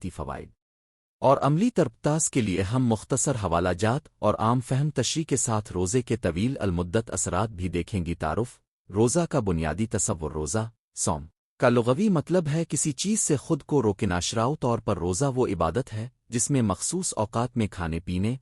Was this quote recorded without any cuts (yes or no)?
no